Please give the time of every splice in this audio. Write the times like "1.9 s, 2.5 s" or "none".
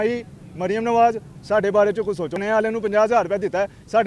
2.4 s